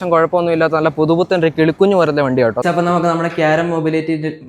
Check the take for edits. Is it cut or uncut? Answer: cut